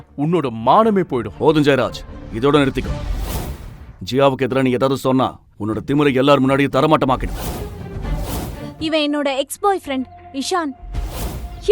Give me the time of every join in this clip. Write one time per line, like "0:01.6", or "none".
0:08.8